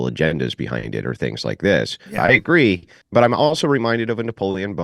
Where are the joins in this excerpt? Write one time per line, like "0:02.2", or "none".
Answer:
0:02.2
0:02.9